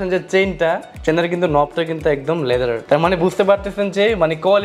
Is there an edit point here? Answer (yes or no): no